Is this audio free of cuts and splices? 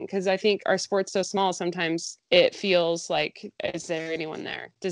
no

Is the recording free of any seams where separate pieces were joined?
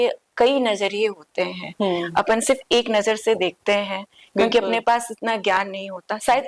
yes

